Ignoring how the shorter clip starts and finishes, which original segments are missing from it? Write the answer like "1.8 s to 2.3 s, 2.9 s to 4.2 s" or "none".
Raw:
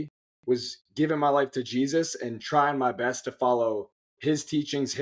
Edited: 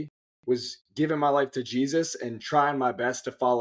none

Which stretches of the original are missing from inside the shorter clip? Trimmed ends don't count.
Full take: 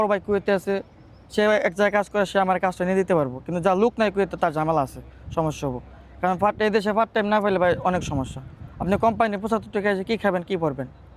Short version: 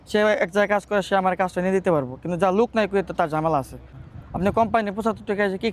5.2 s to 8.4 s

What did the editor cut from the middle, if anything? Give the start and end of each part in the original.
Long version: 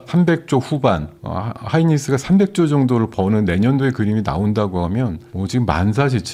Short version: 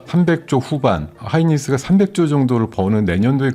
1.1 s to 1.6 s

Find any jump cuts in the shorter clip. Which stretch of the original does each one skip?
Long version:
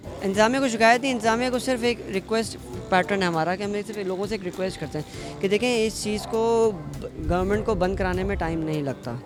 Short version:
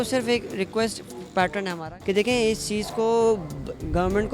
3.3 s to 5.1 s

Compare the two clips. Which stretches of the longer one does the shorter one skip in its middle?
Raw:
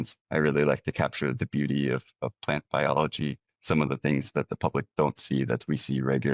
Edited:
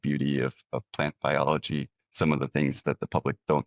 none

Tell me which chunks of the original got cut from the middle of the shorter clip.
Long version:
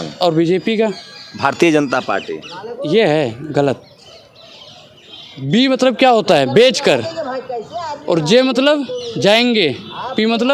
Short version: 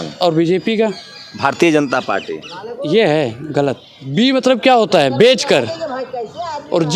3.9 s to 5.3 s

